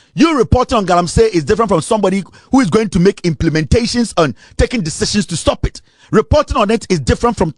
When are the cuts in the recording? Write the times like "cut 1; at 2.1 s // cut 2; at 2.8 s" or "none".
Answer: none